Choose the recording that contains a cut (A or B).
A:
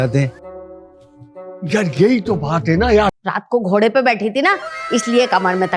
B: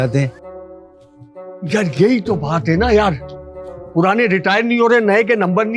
A